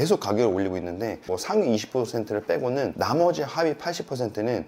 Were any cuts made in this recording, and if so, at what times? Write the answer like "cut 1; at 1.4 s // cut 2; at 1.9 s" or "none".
cut 1; at 1.3 s